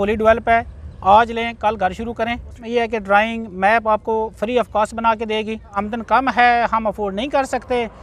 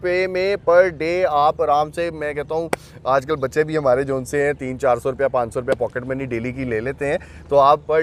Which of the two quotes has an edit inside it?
first; 2 cuts; at 2.5 s, 5.8 s

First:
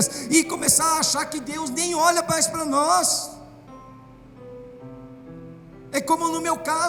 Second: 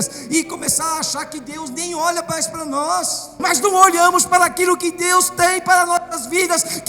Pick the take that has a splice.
second; 1 cut; at 3.3 s

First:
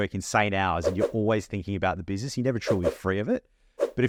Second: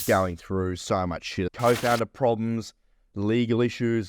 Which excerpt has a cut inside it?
second; 1 cut; at 1.5 s

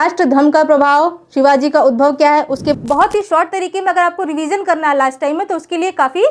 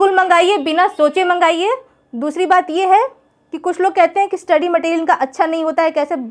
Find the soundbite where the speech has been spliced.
first; 1 cut; at 2.7 s

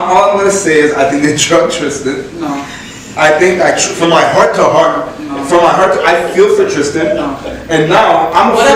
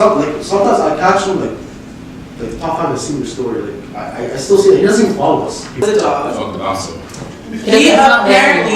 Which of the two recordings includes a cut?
second; 1 cut; at 5.8 s

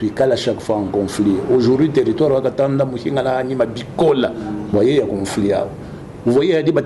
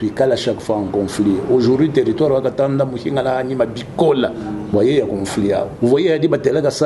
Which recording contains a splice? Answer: second; 1 cut; at 5.7 s

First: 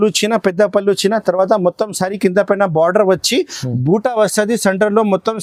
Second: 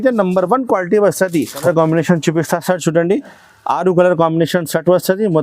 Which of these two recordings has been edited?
second; 1 cut; at 1.6 s

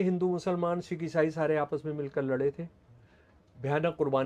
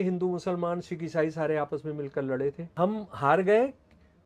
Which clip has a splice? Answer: second; 1 cut; at 2.6 s

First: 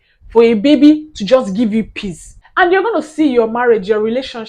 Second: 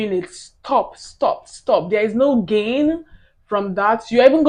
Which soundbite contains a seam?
first; 1 cut; at 2.3 s

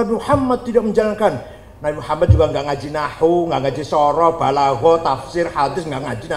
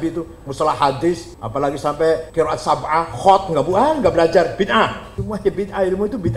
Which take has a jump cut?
second; 3 cuts; at 1.4 s, 2.3 s, 5.1 s

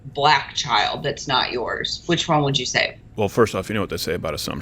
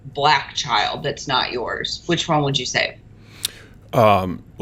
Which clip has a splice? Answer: first; 1 cut; at 3.0 s

